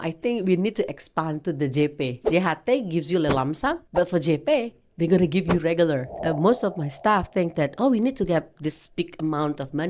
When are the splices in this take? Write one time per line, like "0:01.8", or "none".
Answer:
0:02.3
0:03.8
0:06.1